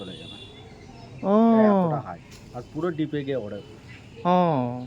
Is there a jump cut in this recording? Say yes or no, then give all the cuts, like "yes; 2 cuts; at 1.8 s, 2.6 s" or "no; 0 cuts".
no; 0 cuts